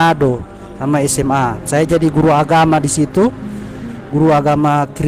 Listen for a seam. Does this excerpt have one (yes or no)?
no